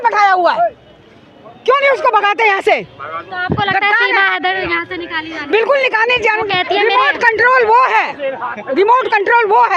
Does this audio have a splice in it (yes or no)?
no